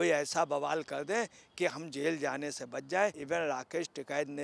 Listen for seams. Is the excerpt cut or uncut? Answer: cut